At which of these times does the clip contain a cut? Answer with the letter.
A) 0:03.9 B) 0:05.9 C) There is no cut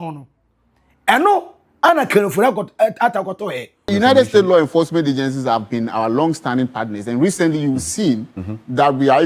A